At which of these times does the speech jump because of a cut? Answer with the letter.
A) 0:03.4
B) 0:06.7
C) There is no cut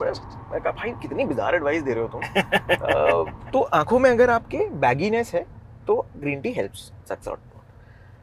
A